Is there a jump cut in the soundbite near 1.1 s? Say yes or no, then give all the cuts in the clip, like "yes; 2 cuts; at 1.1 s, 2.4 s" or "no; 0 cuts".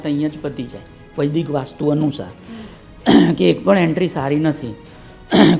no; 0 cuts